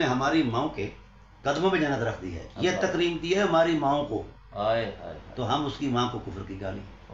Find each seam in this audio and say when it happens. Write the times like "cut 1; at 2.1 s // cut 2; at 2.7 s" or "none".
none